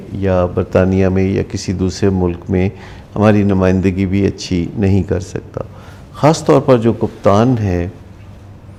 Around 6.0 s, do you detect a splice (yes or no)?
no